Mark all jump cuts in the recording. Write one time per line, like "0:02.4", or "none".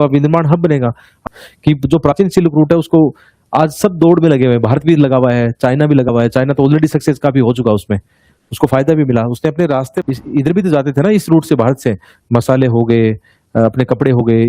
0:01.2
0:10.1